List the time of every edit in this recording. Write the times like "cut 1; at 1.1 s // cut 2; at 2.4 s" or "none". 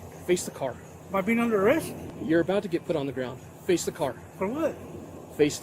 cut 1; at 0.9 s // cut 2; at 2.2 s